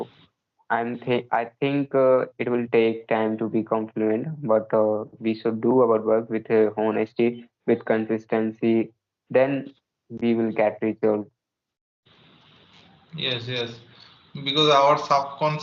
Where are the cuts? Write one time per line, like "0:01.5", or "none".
none